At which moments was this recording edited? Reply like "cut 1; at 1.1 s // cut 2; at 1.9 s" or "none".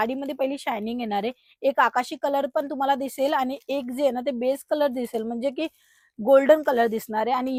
none

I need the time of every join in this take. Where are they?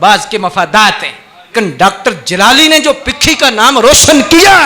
cut 1; at 1.5 s

